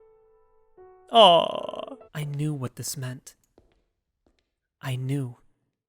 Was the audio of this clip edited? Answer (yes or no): yes